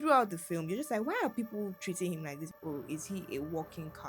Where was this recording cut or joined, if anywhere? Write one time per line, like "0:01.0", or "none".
0:02.5